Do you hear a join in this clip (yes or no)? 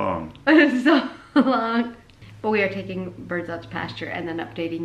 yes